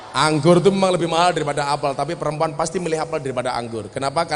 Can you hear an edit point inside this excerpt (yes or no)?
no